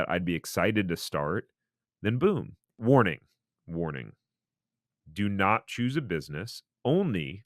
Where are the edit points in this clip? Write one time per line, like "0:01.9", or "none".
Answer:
0:02.8